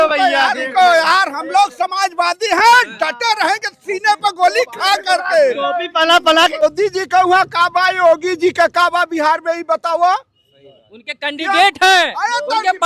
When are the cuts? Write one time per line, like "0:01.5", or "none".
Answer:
0:06.6